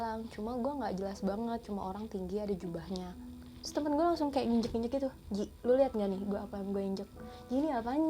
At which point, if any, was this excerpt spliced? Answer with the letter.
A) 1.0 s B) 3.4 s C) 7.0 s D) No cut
B